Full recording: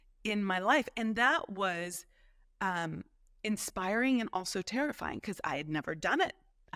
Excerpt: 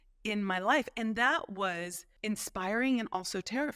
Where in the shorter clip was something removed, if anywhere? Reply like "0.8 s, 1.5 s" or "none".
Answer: 2.0 s